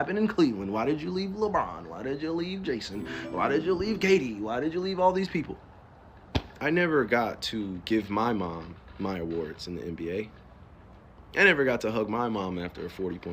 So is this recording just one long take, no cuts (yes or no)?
no